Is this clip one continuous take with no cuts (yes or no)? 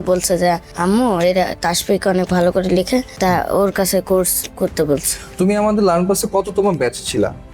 yes